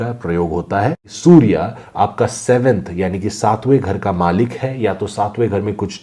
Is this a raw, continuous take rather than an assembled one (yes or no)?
no